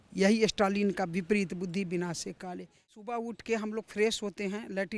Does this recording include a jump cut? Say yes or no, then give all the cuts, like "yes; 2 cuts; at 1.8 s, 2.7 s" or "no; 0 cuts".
yes; 1 cut; at 2.9 s